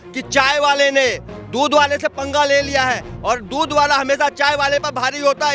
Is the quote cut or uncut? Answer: uncut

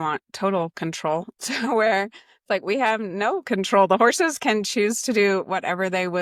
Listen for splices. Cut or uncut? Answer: uncut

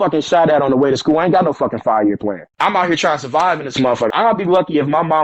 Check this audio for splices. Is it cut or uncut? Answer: cut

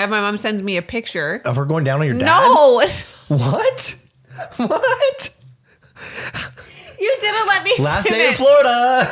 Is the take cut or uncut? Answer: cut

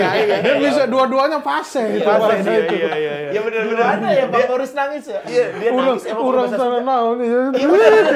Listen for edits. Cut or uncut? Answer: uncut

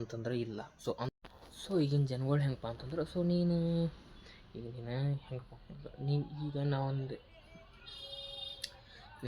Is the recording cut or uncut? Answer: cut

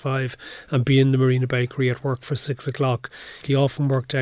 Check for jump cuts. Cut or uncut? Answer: cut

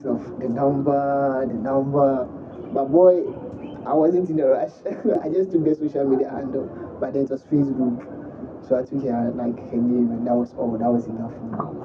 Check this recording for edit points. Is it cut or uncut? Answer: uncut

